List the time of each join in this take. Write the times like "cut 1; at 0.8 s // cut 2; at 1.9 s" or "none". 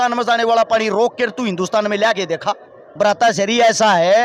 cut 1; at 2.8 s